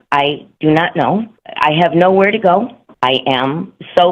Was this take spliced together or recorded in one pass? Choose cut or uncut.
cut